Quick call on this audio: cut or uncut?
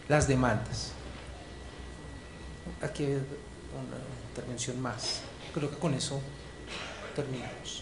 uncut